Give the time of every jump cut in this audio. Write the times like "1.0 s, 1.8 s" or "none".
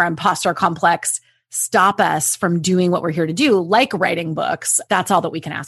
4.7 s